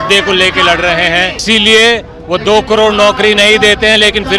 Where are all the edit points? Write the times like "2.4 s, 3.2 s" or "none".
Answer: 1.4 s